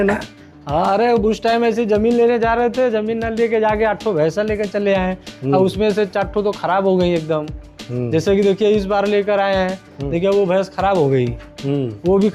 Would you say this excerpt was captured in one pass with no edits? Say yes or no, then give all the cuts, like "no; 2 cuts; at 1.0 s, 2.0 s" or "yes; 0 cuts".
yes; 0 cuts